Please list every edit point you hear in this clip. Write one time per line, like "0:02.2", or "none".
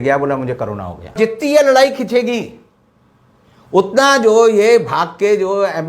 0:01.1

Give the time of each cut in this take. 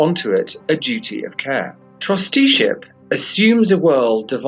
0:01.8

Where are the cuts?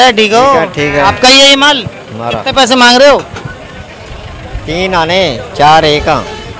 none

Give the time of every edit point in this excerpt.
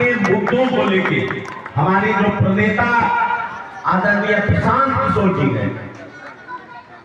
none

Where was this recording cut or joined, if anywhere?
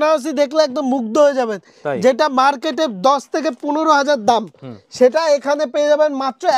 none

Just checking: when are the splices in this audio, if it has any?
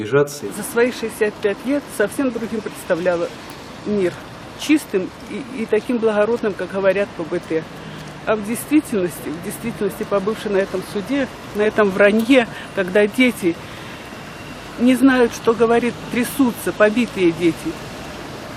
none

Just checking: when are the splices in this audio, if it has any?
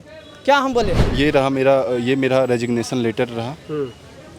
0:01.0

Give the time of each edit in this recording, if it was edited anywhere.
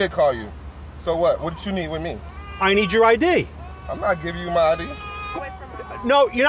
0:05.3

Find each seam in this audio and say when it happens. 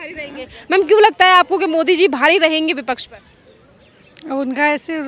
none

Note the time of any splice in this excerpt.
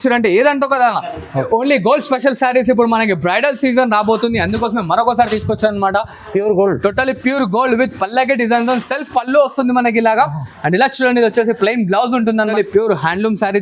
0:01.5
0:12.5

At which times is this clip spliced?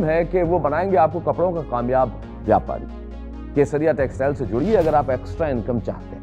none

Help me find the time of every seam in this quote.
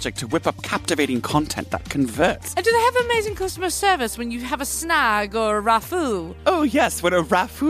0:02.4

